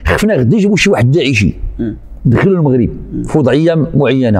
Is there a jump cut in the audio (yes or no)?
no